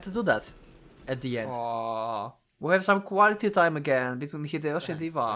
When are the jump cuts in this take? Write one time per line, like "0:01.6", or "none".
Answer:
0:01.5